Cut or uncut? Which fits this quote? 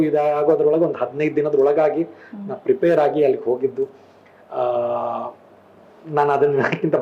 uncut